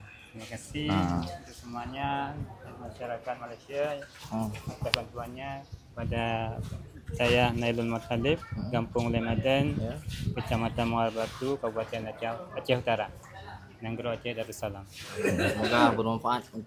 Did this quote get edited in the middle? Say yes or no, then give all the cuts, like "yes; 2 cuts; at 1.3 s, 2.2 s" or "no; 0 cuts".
no; 0 cuts